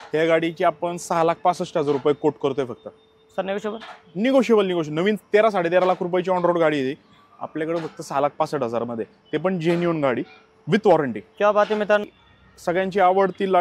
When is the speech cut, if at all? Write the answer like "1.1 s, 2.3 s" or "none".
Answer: none